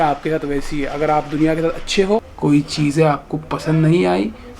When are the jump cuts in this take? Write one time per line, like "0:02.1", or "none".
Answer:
0:02.3